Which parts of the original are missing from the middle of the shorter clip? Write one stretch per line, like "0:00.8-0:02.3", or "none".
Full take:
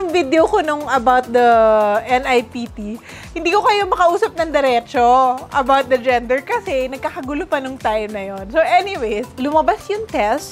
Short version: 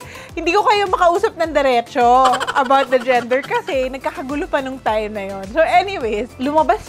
none

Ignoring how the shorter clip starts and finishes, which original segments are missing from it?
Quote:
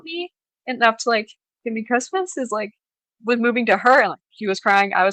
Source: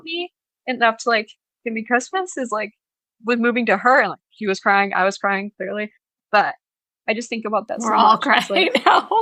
none

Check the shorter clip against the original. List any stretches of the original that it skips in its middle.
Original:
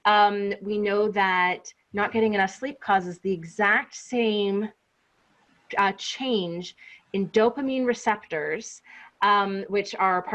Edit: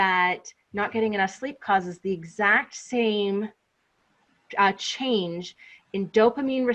none

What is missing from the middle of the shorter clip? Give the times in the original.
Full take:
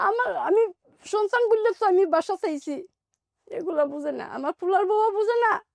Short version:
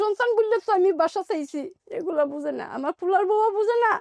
0:02.9-0:03.4

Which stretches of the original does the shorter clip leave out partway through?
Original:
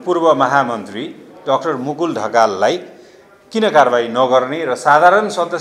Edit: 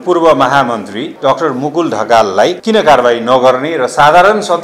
0:01.0-0:01.3
0:02.8-0:03.5

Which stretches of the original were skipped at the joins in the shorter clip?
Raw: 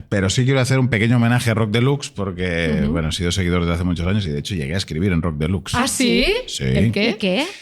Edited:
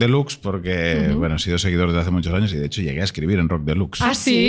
none

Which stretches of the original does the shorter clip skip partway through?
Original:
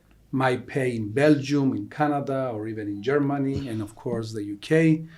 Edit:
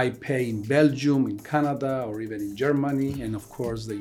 none

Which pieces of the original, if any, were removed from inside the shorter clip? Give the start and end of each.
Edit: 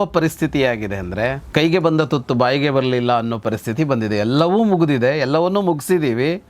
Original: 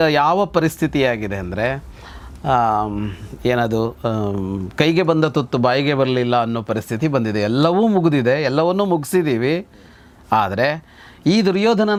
0:01.8-0:04.7

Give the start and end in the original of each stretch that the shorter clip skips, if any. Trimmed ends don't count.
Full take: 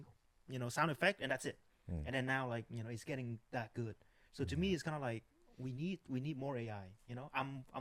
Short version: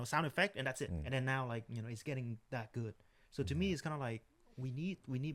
0:01.6-0:02.0

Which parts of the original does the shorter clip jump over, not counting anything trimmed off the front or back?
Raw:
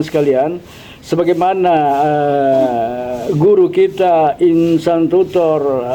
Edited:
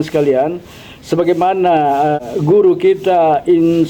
0:02.2-0:03.1

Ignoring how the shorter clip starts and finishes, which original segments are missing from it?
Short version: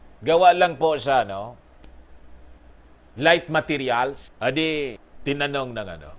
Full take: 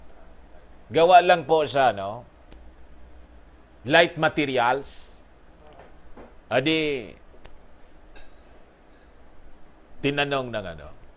0:04.9-0:06.4
0:07.2-0:09.8

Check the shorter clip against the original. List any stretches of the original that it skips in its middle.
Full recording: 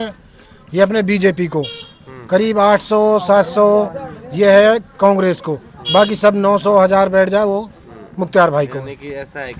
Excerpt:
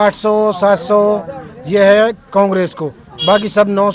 none

